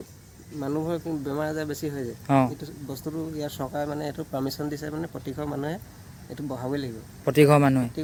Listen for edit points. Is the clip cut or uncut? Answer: uncut